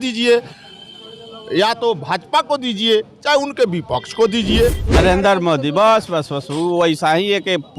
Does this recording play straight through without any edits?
no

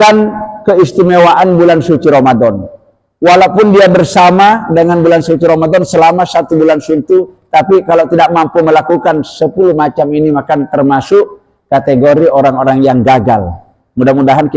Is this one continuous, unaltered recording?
yes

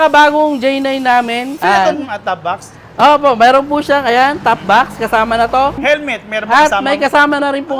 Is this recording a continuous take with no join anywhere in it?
no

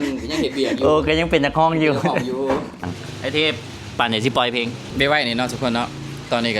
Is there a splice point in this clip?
yes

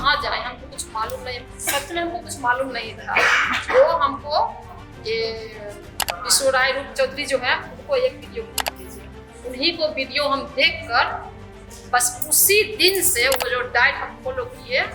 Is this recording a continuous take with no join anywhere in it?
yes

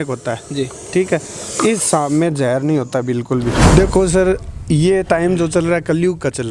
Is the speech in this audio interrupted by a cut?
yes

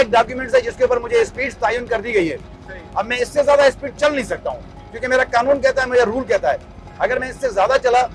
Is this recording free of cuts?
yes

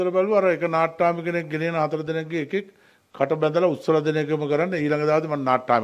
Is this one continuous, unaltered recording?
yes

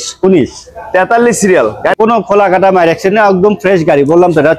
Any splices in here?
yes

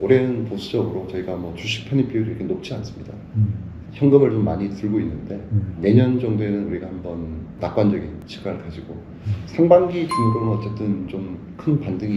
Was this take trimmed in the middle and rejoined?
yes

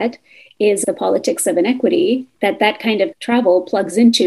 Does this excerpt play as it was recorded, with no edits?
no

